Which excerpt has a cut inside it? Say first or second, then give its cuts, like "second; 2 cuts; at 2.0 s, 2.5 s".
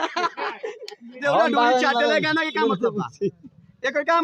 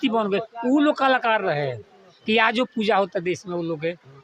first; 1 cut; at 1.2 s